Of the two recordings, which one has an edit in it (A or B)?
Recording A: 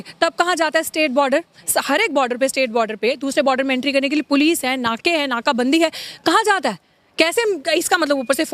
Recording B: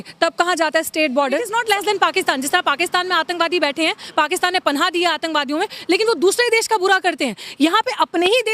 B